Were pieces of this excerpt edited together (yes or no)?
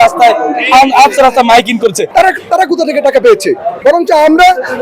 yes